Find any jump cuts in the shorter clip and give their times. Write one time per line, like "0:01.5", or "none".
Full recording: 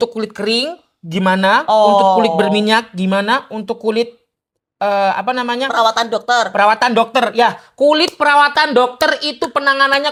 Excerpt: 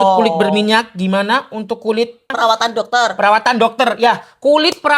0:02.3